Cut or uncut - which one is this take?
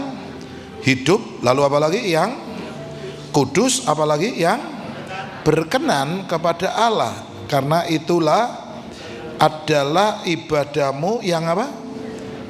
uncut